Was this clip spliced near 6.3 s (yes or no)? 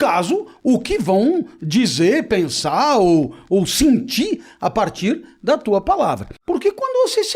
yes